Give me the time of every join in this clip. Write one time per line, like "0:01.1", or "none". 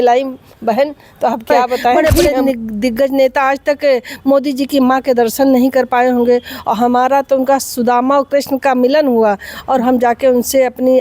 0:02.2